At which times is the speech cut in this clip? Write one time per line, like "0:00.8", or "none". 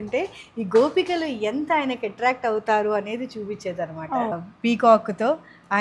0:04.3